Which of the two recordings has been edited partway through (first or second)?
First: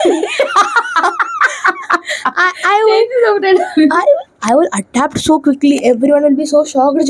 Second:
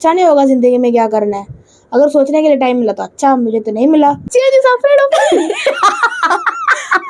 second